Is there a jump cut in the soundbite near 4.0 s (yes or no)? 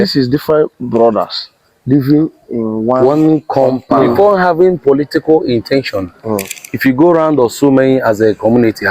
yes